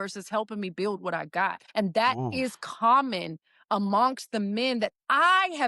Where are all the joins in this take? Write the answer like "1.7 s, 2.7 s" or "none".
1.6 s

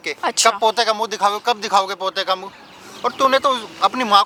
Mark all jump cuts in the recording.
none

